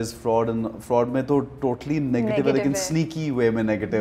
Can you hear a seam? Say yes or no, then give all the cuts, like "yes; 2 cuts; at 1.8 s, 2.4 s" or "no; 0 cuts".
no; 0 cuts